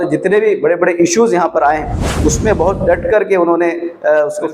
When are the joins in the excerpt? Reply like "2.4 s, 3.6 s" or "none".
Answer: none